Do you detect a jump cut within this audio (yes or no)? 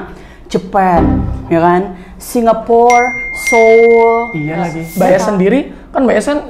yes